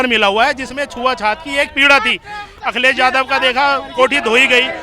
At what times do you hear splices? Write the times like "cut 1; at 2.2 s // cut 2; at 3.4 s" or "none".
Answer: cut 1; at 2.5 s